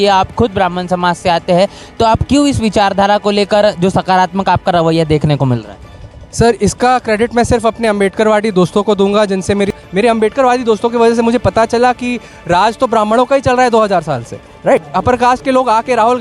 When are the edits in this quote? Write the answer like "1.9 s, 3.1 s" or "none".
9.7 s, 14.9 s

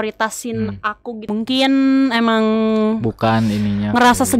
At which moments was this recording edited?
1.1 s

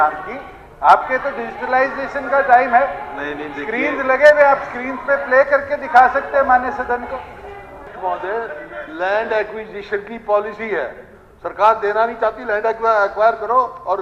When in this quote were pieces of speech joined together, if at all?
7.9 s

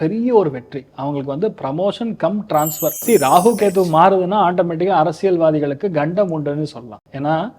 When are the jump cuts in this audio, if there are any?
3.0 s

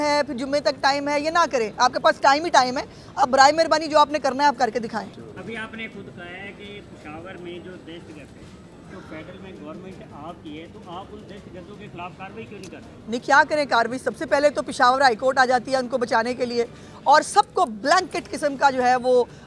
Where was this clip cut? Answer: 5.1 s

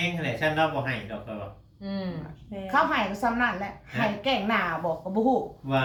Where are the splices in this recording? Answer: none

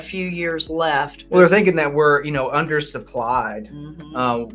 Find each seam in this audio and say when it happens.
1.2 s

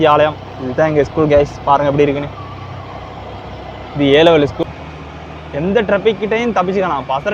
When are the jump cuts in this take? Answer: 4.6 s

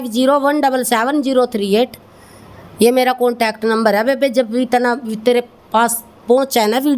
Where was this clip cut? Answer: none

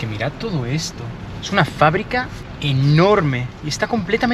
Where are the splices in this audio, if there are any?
none

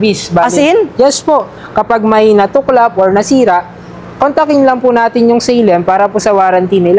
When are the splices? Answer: none

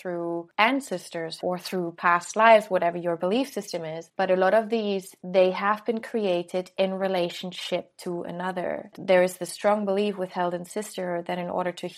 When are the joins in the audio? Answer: 1.4 s, 4.0 s, 5.2 s, 8.9 s

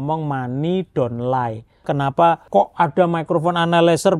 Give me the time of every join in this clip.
2.1 s

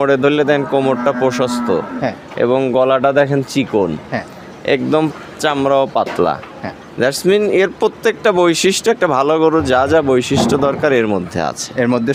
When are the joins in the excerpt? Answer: none

